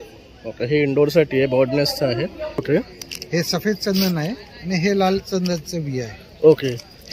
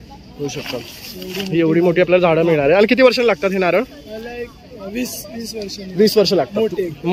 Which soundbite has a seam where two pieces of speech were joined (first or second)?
first